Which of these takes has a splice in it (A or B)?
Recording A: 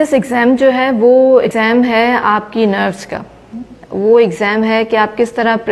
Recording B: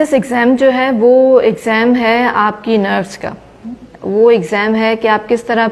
A